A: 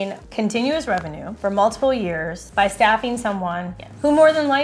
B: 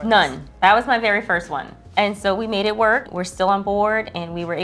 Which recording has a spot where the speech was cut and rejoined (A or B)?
B